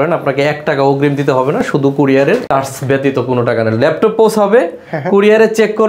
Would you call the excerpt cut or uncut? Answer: uncut